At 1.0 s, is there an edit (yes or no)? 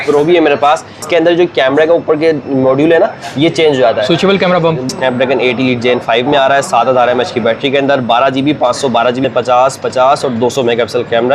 yes